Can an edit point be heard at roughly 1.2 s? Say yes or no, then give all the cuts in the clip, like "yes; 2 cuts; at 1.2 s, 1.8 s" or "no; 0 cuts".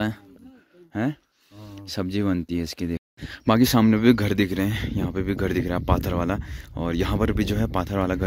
no; 1 cut; at 3.1 s